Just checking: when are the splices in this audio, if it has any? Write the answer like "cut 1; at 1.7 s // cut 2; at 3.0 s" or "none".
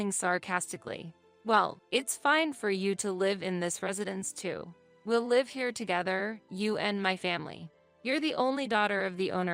cut 1; at 1.2 s